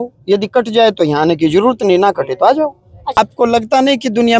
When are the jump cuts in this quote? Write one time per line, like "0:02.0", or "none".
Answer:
0:03.2

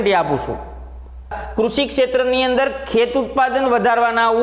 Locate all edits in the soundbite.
0:01.4

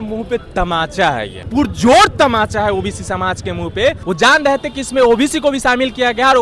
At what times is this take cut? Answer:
0:01.4
0:04.0

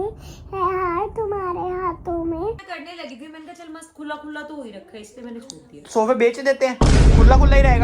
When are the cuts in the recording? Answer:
0:02.7

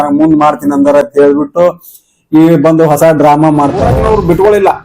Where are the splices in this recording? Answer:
0:03.9

